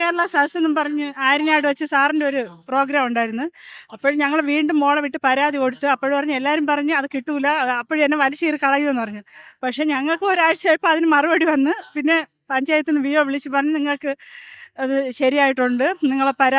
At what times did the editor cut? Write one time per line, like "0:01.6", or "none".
none